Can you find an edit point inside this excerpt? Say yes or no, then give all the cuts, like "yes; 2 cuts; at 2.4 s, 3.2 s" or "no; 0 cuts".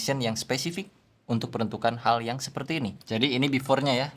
yes; 1 cut; at 3.0 s